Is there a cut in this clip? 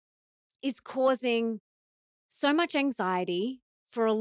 no; 0 cuts

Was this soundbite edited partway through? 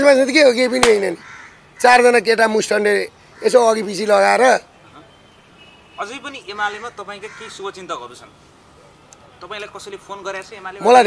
no; 0 cuts

